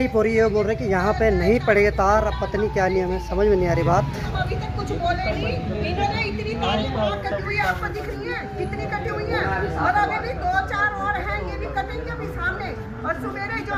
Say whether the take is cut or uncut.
uncut